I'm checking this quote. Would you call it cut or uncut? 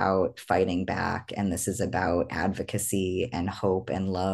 uncut